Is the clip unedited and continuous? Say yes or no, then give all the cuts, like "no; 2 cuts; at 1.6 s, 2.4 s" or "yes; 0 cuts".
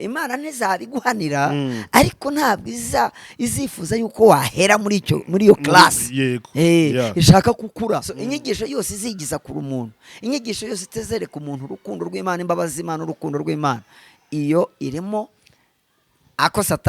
no; 1 cut; at 8.1 s